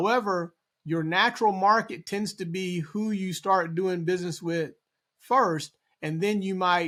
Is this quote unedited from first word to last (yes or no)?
yes